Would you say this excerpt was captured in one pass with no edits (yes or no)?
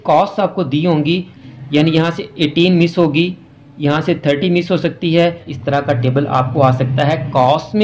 no